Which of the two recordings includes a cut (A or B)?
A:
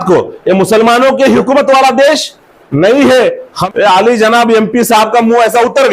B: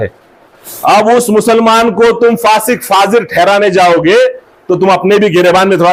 A